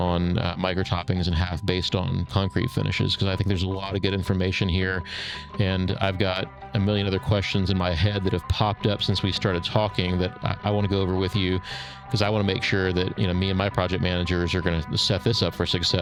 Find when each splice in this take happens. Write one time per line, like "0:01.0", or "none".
none